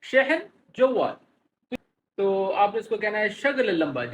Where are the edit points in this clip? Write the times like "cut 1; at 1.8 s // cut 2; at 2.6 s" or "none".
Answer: cut 1; at 1.7 s